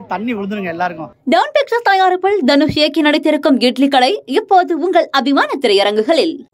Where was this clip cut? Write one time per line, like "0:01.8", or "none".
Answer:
0:01.1